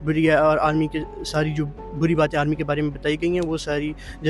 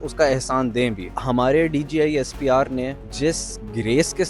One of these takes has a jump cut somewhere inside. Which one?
second; 2 cuts; at 1.1 s, 3.0 s

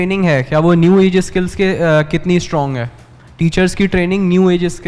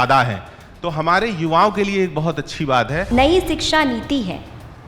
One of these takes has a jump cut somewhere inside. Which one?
second; 1 cut; at 3.1 s

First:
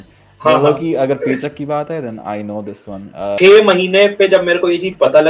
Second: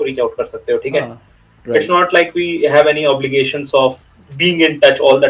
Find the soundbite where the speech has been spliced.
first; 1 cut; at 3.3 s

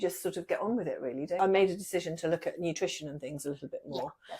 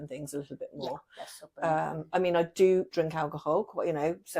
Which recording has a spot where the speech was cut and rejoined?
first; 1 cut; at 1.4 s

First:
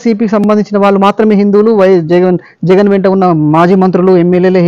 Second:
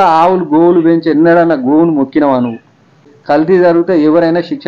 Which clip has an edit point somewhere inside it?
second; 1 cut; at 3.0 s

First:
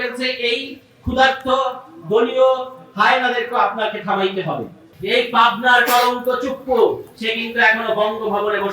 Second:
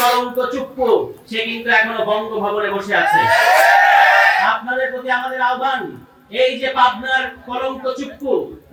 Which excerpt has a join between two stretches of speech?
first; 1 cut; at 4.8 s

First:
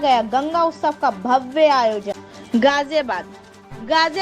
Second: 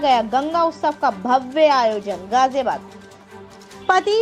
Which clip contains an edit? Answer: first; 1 cut; at 2.1 s

